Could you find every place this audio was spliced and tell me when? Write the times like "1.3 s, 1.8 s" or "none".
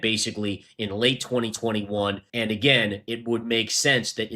none